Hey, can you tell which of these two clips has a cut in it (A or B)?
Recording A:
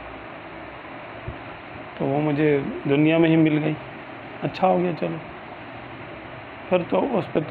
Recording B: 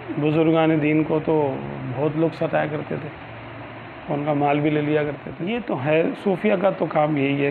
B